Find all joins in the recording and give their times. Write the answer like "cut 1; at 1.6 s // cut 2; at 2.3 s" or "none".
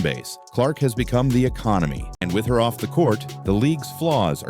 cut 1; at 2.1 s